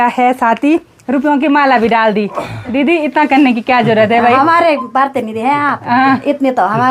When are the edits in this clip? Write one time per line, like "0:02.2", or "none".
none